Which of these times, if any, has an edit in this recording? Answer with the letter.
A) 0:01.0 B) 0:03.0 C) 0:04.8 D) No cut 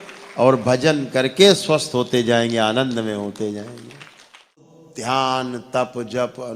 C